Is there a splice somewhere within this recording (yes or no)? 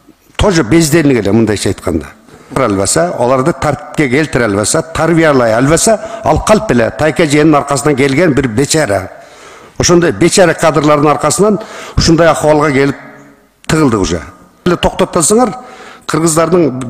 yes